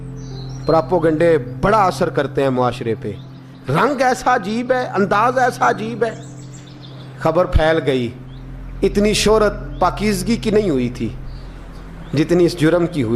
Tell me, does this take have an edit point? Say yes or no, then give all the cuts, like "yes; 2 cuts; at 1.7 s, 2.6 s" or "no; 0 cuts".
yes; 1 cut; at 6.7 s